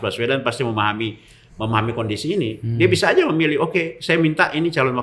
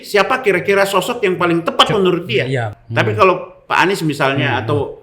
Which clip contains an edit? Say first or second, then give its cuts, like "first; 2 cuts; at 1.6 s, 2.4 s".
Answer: second; 1 cut; at 2.8 s